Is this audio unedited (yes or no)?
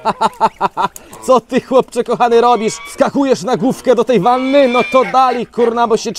yes